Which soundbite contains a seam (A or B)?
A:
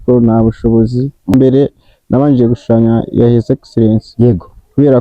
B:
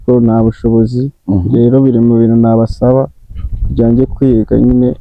A